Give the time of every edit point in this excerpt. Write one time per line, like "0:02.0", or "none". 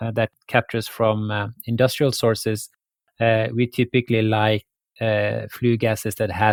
none